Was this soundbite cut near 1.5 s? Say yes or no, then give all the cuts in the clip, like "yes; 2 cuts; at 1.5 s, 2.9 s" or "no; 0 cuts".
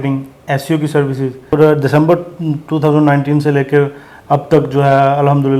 yes; 1 cut; at 1.5 s